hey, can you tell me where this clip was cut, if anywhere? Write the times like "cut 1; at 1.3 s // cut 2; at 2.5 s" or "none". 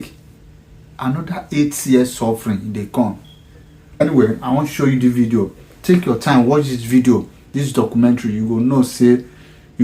cut 1; at 4.0 s

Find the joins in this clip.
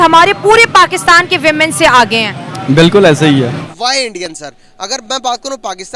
cut 1; at 3.7 s

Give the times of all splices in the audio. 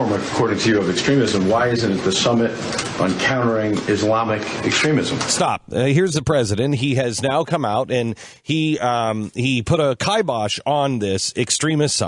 none

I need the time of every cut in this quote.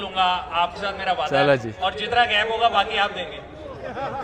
none

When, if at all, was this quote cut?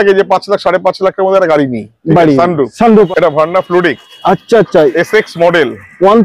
cut 1; at 3.1 s

